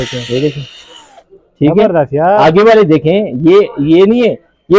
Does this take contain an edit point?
no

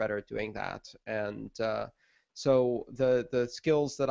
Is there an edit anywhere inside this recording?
yes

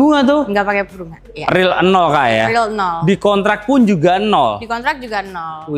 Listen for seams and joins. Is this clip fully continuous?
yes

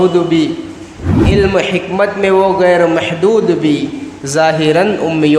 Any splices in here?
no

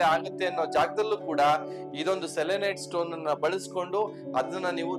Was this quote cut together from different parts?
no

